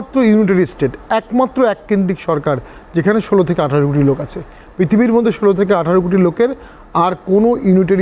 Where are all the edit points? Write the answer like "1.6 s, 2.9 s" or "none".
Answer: none

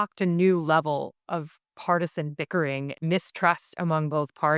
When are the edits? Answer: 1.2 s, 2.9 s

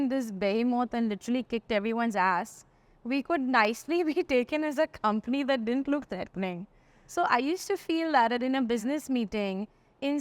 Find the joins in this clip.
none

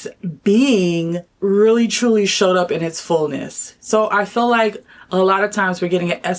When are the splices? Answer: 1.3 s

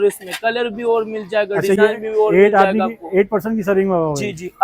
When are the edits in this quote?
none

